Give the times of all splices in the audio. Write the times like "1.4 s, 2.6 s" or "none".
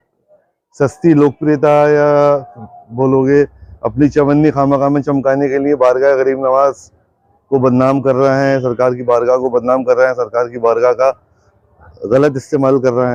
none